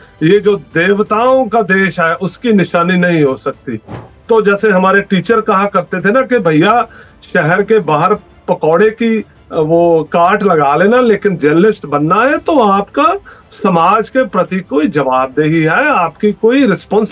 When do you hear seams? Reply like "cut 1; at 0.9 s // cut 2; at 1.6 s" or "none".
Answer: cut 1; at 4.2 s